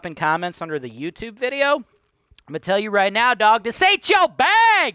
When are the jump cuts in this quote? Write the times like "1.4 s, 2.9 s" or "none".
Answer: none